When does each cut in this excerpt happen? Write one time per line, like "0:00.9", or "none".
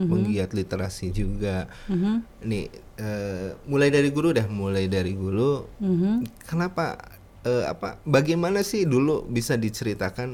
none